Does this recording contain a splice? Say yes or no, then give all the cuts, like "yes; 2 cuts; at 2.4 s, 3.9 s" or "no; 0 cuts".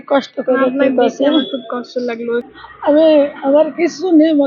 yes; 1 cut; at 2.6 s